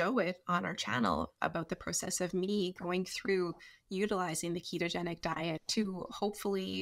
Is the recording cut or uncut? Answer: cut